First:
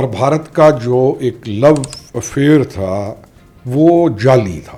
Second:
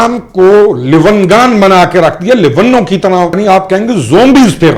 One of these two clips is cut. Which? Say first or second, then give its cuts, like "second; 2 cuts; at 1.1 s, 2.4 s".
second; 1 cut; at 3.4 s